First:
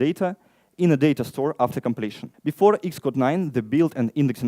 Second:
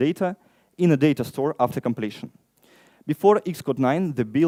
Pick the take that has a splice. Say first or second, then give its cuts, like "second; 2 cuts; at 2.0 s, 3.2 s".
first; 1 cut; at 2.3 s